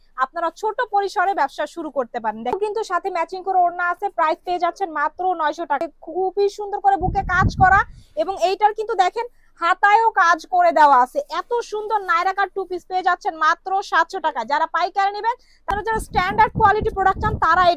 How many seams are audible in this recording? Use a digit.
3